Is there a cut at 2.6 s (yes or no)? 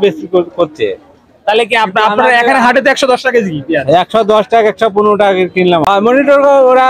no